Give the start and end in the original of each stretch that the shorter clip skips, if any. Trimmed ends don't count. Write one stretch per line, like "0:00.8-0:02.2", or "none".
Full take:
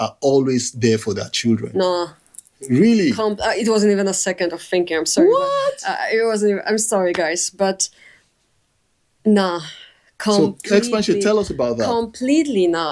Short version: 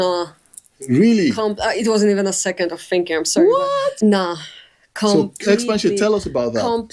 0:05.8-0:09.2